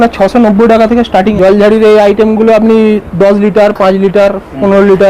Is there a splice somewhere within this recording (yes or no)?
yes